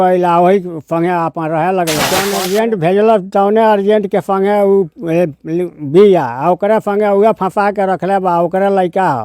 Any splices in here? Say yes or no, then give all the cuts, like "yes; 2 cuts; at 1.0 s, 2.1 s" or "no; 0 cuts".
yes; 1 cut; at 2.2 s